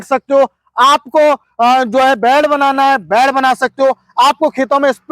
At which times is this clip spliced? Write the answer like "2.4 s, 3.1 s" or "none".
none